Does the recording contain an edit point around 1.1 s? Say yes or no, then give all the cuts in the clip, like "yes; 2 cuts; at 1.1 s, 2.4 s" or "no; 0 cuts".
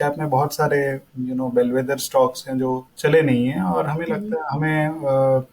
yes; 2 cuts; at 1.1 s, 2.9 s